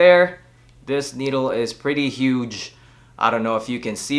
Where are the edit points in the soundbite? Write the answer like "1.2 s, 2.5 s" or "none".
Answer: none